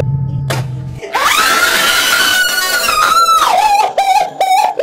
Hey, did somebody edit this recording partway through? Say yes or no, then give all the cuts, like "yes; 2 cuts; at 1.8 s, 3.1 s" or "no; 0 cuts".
no; 0 cuts